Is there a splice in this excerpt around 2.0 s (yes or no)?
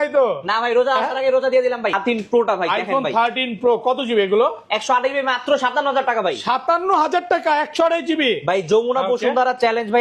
yes